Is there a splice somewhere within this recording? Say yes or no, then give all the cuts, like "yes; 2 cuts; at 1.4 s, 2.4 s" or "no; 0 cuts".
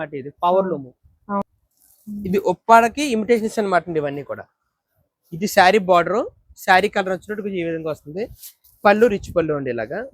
yes; 1 cut; at 1.4 s